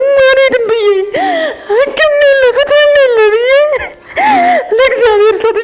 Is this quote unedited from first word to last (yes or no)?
yes